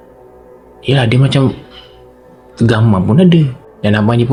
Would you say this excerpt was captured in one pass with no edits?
yes; 0 cuts

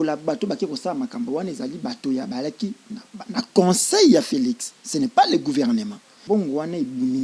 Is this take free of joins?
no; 1 cut; at 6.2 s

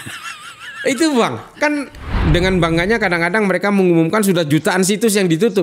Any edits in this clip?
yes; 1 cut; at 2.2 s

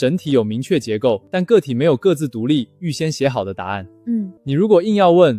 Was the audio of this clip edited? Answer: no; 0 cuts

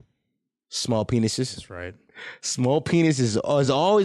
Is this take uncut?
yes; 0 cuts

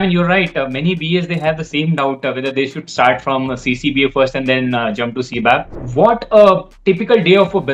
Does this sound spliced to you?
yes; 1 cut; at 5.8 s

